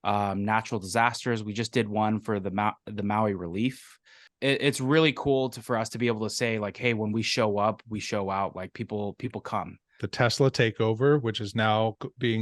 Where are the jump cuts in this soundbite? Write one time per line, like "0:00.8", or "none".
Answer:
0:04.3
0:10.0